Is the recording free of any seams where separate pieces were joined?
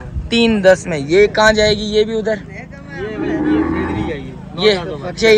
yes; 0 cuts

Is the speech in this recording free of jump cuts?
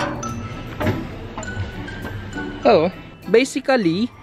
yes; 0 cuts

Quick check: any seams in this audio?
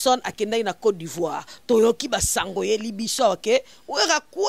no; 0 cuts

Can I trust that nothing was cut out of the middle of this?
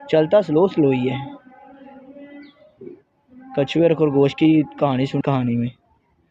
no; 1 cut; at 5.1 s

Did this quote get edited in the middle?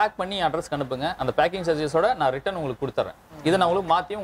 no; 0 cuts

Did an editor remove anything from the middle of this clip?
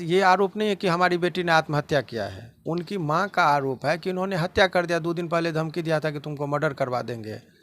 no; 0 cuts

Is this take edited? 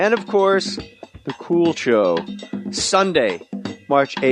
yes; 1 cut; at 2.1 s

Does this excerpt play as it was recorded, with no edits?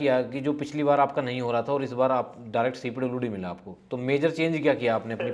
yes; 0 cuts

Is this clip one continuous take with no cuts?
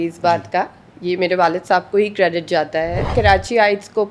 no; 1 cut; at 3.1 s

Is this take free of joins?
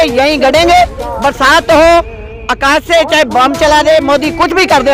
yes; 0 cuts

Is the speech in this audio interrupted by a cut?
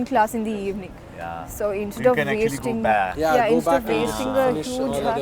no; 0 cuts

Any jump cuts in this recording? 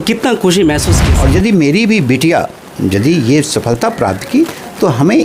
yes; 1 cut; at 1.0 s

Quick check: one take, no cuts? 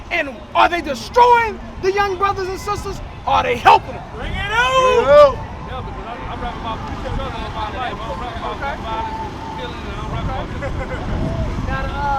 yes; 0 cuts

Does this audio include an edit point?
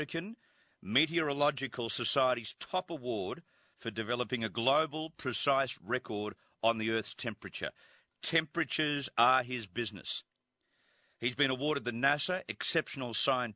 no; 0 cuts

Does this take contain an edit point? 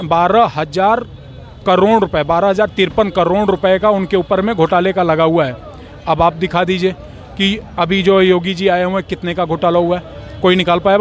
no; 0 cuts

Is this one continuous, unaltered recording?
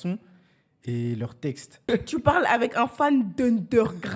no; 1 cut; at 1.9 s

